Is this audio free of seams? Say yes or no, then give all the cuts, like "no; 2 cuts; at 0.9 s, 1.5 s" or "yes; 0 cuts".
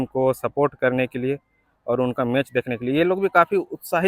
yes; 0 cuts